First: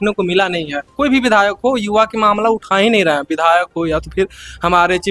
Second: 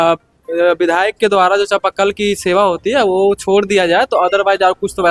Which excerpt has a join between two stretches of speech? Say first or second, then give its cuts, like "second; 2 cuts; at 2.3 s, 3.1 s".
first; 1 cut; at 0.9 s